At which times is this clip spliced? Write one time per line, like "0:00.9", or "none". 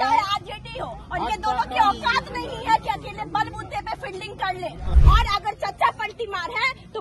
0:04.9